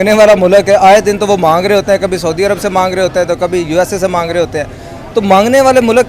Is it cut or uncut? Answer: uncut